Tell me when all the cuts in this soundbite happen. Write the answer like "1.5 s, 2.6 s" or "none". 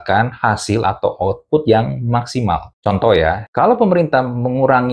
2.7 s, 3.4 s